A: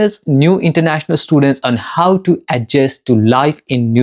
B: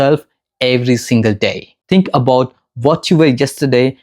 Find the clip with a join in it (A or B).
B